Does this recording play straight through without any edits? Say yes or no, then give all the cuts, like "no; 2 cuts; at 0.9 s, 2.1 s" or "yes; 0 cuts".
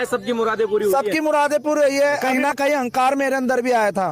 no; 1 cut; at 2.2 s